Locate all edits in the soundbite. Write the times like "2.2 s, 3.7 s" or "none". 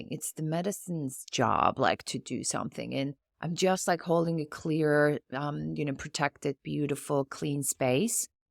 none